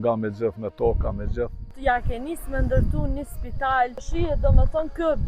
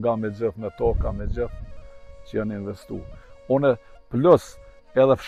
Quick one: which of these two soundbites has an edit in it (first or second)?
first